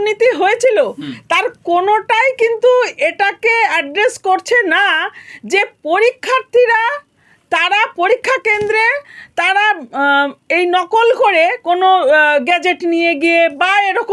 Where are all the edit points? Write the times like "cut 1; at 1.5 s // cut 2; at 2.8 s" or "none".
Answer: none